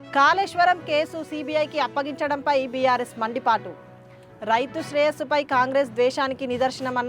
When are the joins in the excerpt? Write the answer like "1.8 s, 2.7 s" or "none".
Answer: none